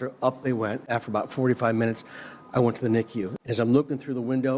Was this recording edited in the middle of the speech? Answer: yes; 2 cuts; at 0.9 s, 3.4 s

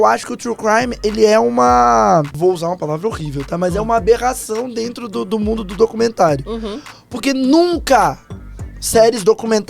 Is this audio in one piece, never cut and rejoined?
no; 1 cut; at 2.3 s

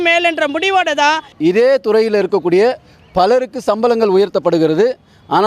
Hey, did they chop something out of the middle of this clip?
yes; 1 cut; at 1.3 s

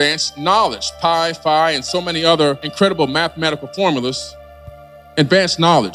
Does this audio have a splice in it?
no; 0 cuts

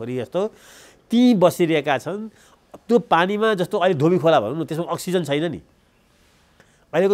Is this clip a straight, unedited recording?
yes; 0 cuts

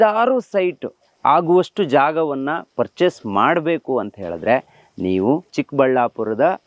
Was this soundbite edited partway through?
yes; 1 cut; at 5.6 s

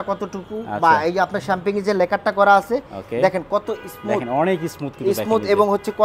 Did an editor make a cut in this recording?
no; 0 cuts

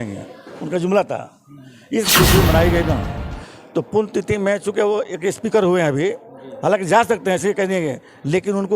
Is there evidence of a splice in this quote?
yes; 1 cut; at 2.1 s

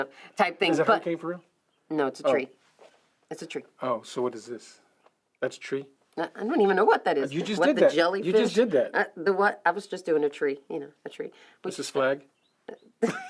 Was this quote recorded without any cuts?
yes; 0 cuts

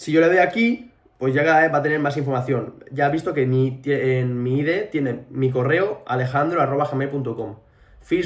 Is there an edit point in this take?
no; 0 cuts

